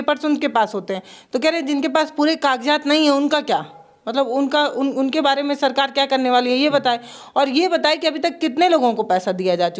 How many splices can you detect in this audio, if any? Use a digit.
0